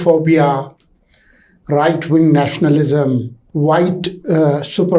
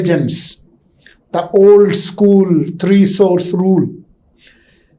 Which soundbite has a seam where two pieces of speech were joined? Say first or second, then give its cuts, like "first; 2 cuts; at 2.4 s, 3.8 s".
first; 1 cut; at 3.4 s